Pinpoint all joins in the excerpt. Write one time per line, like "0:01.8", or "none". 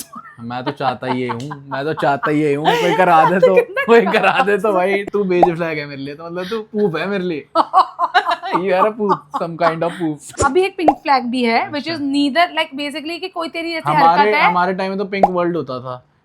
0:05.0
0:10.3